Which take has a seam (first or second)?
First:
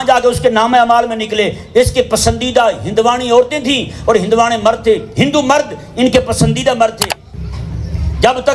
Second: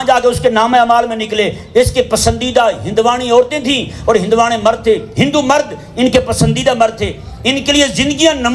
first